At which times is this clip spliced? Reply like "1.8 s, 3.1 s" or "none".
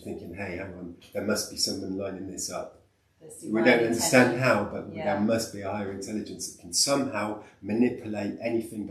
none